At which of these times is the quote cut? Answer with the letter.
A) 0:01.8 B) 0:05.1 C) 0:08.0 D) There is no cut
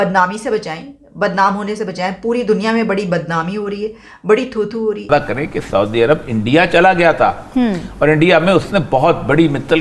B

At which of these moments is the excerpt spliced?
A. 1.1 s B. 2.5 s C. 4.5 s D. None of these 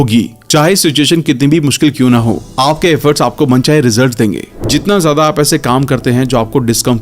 C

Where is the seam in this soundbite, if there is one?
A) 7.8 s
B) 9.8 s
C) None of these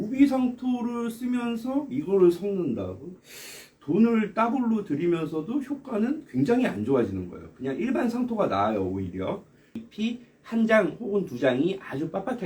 B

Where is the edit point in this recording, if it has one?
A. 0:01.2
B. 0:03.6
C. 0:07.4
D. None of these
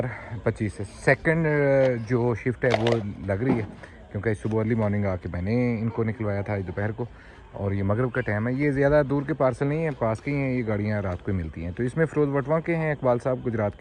D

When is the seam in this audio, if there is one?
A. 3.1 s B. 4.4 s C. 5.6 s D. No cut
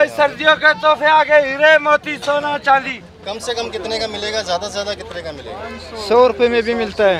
A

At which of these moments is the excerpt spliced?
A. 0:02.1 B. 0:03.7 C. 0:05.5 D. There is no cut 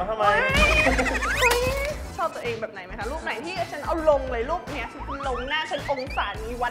A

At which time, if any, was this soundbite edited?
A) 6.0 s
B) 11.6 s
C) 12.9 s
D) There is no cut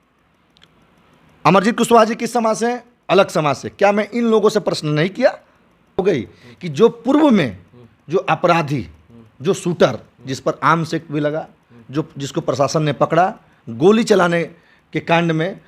A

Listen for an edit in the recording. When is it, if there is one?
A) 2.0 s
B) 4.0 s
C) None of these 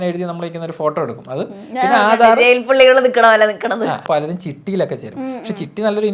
B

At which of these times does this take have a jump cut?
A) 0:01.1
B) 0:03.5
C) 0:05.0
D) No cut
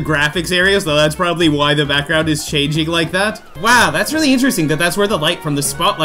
B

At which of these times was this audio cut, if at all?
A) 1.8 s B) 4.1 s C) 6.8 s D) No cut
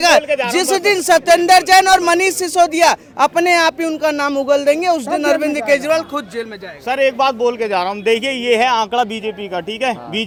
D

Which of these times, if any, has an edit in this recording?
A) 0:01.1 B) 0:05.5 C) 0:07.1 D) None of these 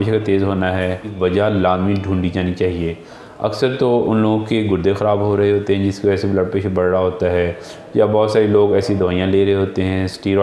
A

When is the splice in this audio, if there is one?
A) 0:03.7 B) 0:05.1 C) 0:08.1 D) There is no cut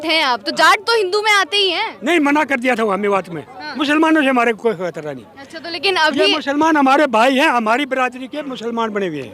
A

